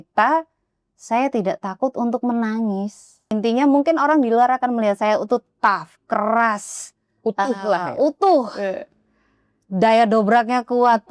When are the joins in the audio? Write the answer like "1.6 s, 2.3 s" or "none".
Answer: 3.3 s